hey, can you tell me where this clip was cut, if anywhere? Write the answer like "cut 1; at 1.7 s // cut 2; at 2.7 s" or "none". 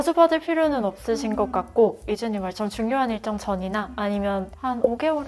none